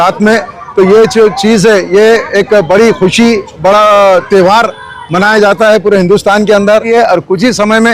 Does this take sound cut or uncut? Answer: cut